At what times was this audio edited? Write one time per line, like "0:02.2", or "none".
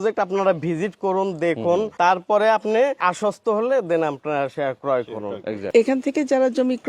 0:01.9
0:03.0
0:05.7